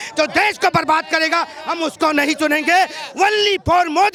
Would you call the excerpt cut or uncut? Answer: uncut